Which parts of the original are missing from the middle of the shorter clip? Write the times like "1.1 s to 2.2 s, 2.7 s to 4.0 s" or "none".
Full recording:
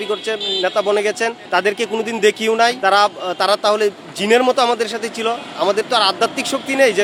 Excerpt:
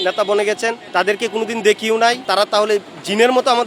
2.8 s to 3.3 s